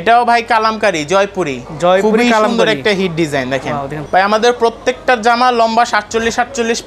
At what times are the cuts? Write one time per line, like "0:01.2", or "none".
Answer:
0:03.9